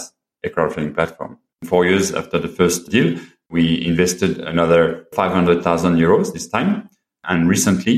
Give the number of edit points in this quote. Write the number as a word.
two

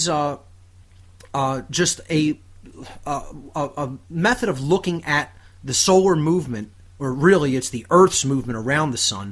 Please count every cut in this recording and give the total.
one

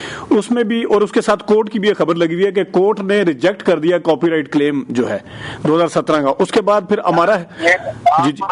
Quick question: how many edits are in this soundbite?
zero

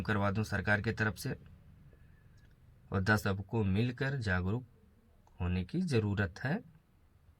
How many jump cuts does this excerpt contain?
one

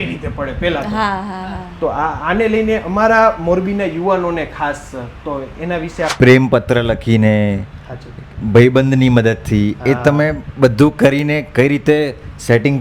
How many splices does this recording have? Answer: one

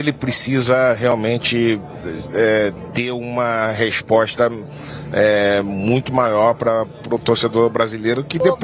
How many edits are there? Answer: zero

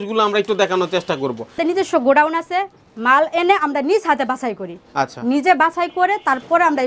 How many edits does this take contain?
one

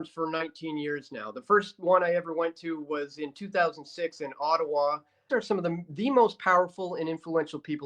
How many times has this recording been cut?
one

